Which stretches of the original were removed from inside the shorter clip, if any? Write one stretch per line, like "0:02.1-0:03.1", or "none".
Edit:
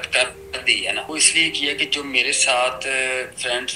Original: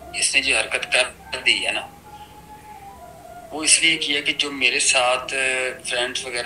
0:01.9-0:03.6